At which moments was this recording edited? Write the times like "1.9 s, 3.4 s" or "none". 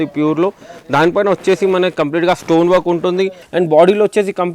3.4 s